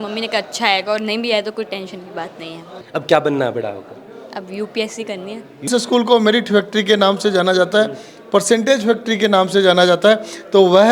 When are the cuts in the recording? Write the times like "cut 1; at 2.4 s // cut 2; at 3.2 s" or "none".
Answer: cut 1; at 2.7 s // cut 2; at 5.7 s